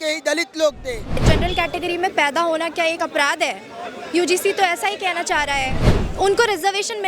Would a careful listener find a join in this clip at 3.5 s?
no; 2 cuts; at 1.2 s, 5.9 s

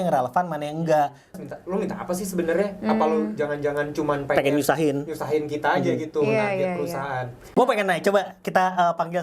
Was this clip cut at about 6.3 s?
no; 2 cuts; at 1.3 s, 7.6 s

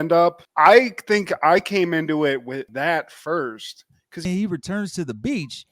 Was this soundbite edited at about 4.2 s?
yes; 1 cut; at 4.2 s

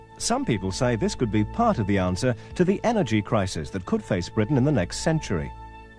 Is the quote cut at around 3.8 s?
yes; 1 cut; at 3.8 s

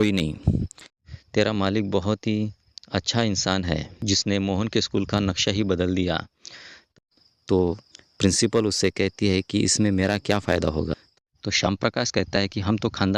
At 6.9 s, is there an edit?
yes; 3 cuts; at 1.0 s, 6.9 s, 11.1 s

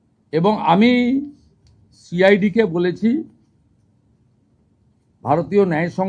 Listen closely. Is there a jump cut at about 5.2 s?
no; 0 cuts

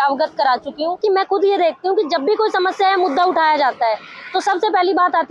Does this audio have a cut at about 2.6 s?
no; 1 cut; at 1.0 s

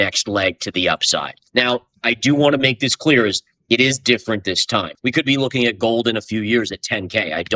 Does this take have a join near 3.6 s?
no; 2 cuts; at 1.4 s, 4.9 s

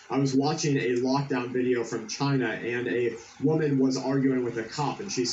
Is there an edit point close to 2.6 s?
yes; 1 cut; at 2.6 s

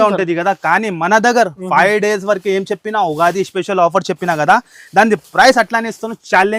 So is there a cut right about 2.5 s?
no; 0 cuts

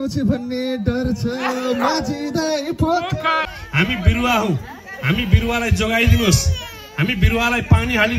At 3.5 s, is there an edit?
yes; 1 cut; at 3.5 s

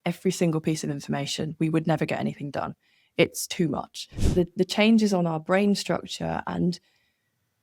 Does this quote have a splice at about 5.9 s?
no; 1 cut; at 4.2 s

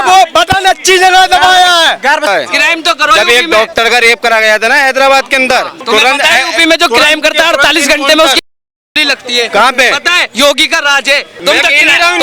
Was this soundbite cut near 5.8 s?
yes; 3 cuts; at 2.3 s, 5.8 s, 11.3 s

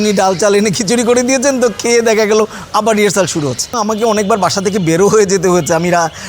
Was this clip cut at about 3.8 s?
yes; 1 cut; at 3.8 s

